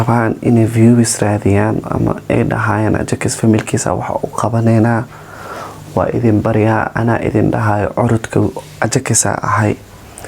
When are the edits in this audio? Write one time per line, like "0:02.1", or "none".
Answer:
none